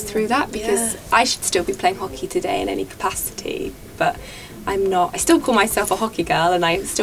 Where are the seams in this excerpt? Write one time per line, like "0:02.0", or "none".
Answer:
none